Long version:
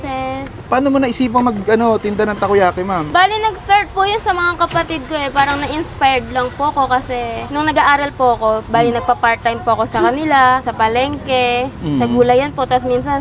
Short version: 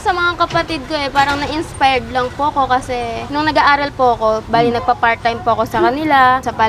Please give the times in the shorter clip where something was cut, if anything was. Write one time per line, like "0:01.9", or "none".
none